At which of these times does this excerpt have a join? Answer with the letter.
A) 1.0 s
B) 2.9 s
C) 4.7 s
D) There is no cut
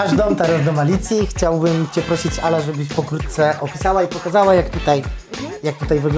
D